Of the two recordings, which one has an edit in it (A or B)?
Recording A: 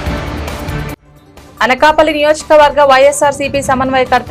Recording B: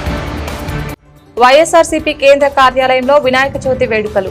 A